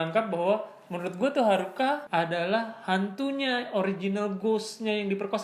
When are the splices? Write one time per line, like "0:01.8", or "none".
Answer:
0:02.0